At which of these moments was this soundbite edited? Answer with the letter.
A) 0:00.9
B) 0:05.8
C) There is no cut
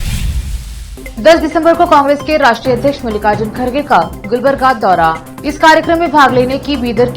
A